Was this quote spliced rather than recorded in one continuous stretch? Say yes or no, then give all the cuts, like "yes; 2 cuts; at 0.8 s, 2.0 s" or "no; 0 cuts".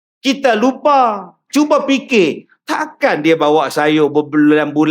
no; 0 cuts